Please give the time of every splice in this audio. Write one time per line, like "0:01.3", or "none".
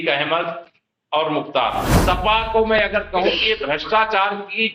0:02.0